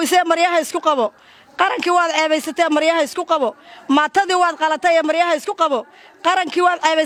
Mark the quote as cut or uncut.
uncut